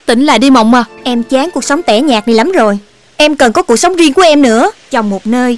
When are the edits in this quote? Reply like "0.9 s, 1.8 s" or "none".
1.0 s, 4.8 s